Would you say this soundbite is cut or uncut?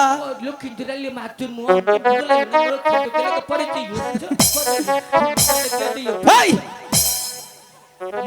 uncut